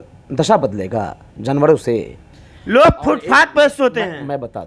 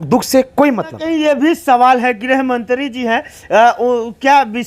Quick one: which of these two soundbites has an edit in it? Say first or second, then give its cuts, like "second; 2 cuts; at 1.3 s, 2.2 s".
second; 1 cut; at 1.0 s